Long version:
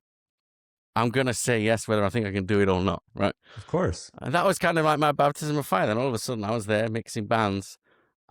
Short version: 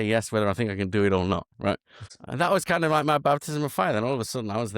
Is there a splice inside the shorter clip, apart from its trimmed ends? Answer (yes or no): yes